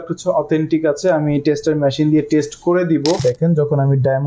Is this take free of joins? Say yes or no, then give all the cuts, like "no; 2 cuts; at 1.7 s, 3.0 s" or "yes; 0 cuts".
no; 1 cut; at 3.2 s